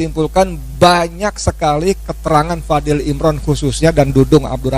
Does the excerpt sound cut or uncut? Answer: uncut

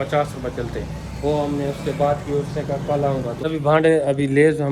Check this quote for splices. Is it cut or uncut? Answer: cut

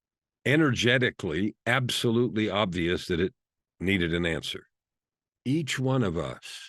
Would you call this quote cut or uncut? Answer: cut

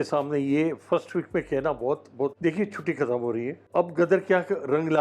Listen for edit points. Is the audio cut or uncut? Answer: cut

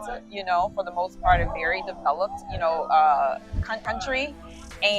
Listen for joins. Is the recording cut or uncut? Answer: cut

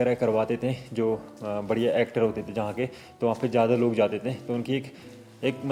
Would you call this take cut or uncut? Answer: uncut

